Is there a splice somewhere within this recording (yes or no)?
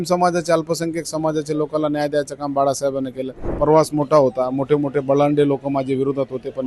yes